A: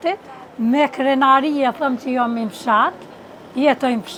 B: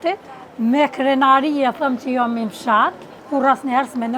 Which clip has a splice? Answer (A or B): B